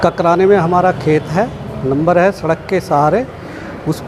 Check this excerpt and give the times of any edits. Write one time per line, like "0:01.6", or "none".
none